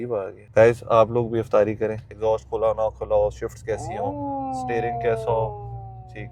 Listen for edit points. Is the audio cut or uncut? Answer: cut